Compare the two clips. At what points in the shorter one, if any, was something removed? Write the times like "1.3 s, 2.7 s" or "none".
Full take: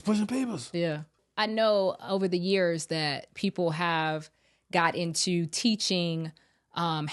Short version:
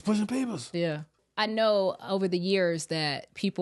none

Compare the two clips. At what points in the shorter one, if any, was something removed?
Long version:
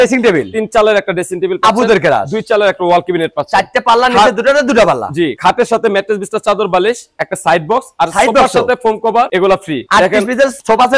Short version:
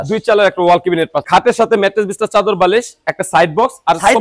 1.2 s

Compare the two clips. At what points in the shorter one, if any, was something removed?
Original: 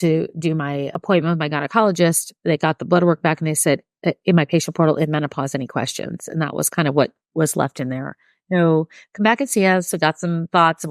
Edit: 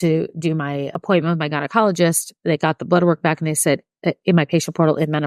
none

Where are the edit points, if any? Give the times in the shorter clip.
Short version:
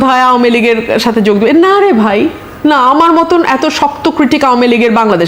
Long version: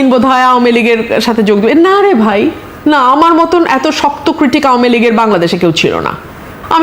none

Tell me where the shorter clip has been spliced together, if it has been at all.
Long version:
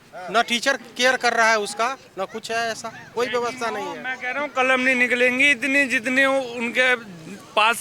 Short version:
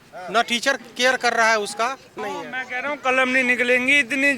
2.2 s

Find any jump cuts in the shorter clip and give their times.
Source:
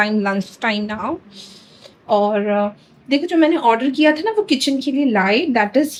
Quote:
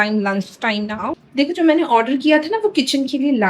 1.2 s

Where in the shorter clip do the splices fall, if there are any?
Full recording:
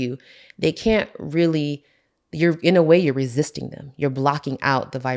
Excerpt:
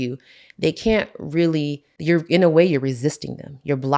1.9 s

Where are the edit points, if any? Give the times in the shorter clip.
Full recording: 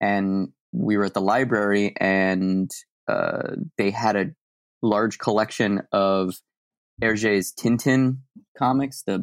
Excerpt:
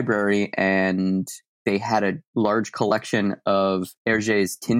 1.5 s, 2.2 s, 3.9 s

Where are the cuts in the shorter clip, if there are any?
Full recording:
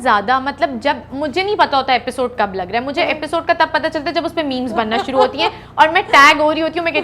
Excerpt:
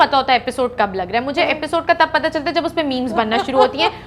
none

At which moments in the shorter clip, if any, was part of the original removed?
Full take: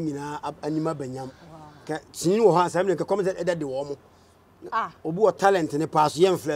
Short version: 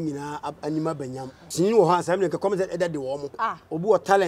1.4 s, 3.3 s

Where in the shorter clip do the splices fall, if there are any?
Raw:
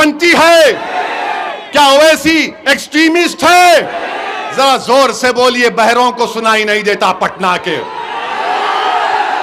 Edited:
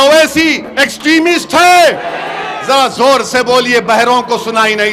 none

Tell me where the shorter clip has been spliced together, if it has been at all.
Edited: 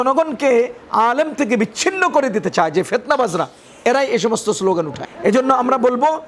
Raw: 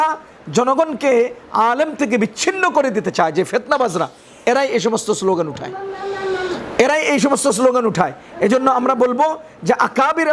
5.1 s

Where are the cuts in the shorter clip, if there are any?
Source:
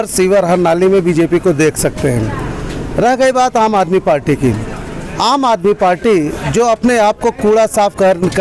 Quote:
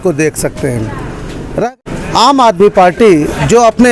1.7 s

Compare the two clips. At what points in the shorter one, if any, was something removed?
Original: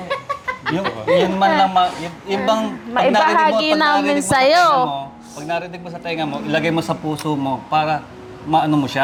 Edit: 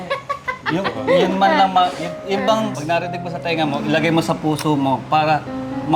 2.8 s

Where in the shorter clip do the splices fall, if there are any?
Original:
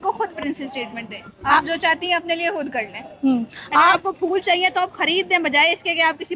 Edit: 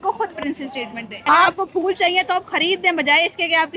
1.1 s

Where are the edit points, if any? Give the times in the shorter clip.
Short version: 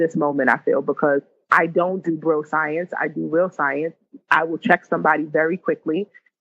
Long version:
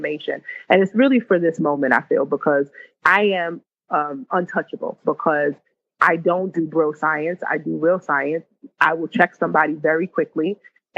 1.4 s

